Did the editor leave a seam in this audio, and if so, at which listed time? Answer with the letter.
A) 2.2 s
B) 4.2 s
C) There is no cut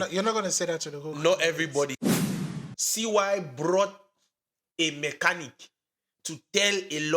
A